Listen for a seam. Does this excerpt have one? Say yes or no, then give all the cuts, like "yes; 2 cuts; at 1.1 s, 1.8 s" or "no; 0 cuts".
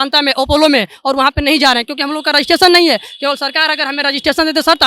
no; 0 cuts